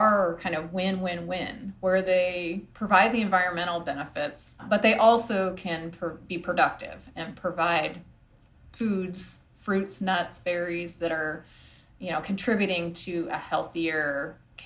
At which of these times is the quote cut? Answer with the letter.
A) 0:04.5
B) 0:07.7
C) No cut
A